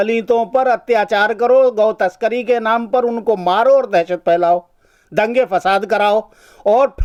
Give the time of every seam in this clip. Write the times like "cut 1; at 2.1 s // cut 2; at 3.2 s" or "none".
none